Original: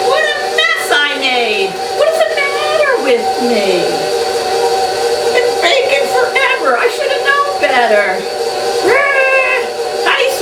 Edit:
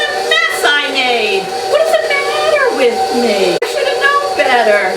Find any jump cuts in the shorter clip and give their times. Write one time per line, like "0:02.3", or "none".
0:03.6